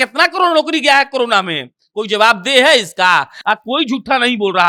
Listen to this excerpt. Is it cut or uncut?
uncut